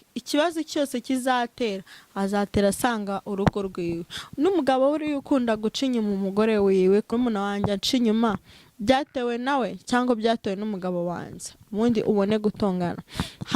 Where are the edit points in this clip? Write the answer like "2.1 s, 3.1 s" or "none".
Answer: 7.1 s